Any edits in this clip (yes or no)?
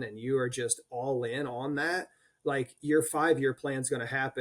no